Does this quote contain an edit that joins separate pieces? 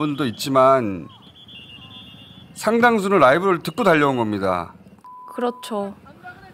no; 0 cuts

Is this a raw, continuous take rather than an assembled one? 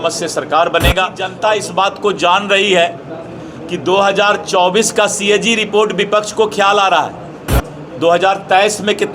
no; 1 cut; at 1.2 s

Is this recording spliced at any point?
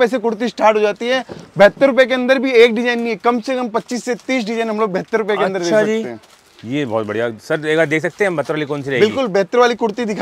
no; 0 cuts

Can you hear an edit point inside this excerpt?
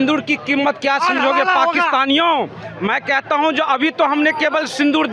no; 0 cuts

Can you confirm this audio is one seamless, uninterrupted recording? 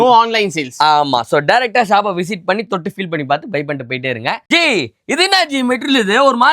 no; 1 cut; at 4.4 s

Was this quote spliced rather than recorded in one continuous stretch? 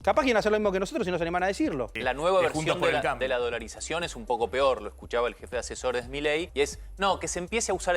yes; 2 cuts; at 1.9 s, 6.5 s

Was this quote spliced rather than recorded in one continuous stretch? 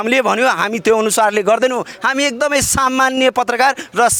no; 0 cuts

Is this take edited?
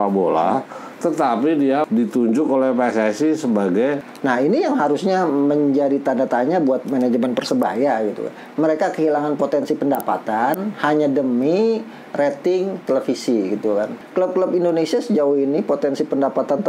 yes; 3 cuts; at 1.9 s, 4.0 s, 14.0 s

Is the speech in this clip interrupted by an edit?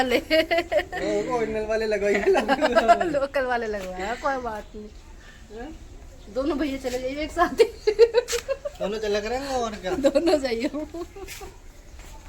no; 0 cuts

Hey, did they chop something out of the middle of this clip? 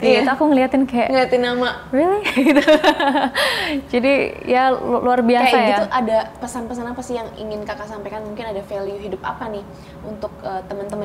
no; 0 cuts

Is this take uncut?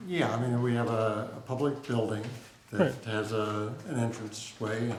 yes; 0 cuts

